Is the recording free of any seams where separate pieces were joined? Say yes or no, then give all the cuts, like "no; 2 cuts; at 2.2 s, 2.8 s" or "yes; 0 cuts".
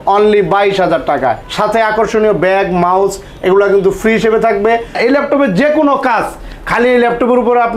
no; 2 cuts; at 1.5 s, 5.0 s